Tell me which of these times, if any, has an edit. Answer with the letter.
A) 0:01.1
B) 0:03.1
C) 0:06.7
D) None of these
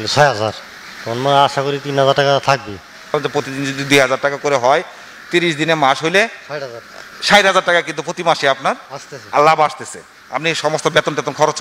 B